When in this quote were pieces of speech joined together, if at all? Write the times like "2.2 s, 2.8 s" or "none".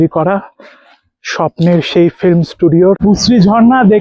3.0 s